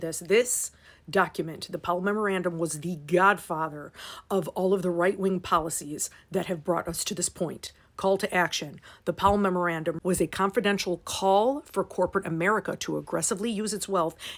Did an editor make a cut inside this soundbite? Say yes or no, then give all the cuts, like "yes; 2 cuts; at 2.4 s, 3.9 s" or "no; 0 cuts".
no; 0 cuts